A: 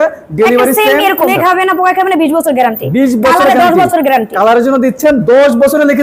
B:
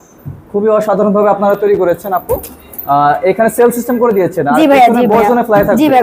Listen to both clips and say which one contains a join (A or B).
A